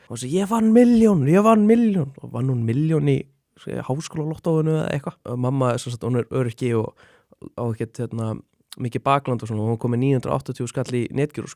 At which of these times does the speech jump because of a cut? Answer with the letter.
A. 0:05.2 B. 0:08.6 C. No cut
A